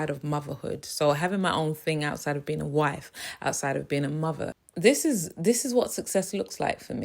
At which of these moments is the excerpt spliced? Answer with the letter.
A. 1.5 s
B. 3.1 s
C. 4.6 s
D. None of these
C